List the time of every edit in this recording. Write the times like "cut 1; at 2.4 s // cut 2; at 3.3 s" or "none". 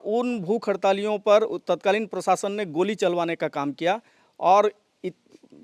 none